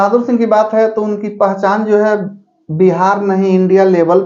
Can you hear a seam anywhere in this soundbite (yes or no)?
no